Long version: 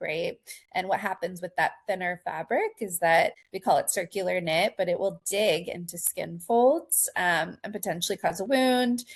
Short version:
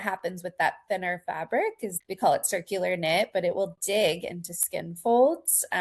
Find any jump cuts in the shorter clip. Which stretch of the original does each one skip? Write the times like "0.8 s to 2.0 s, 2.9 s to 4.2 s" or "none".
2.9 s to 3.4 s